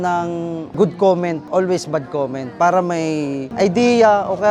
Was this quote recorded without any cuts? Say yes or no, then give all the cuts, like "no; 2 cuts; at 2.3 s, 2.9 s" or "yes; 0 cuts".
no; 1 cut; at 3.0 s